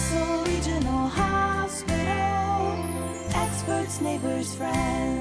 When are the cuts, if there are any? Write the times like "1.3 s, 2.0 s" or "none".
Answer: none